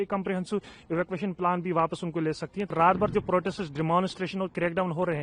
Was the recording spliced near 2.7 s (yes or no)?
yes